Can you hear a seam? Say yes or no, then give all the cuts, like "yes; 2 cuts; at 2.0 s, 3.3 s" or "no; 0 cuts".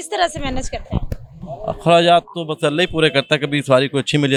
no; 0 cuts